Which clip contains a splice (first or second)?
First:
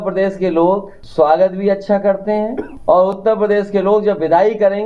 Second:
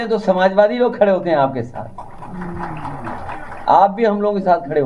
first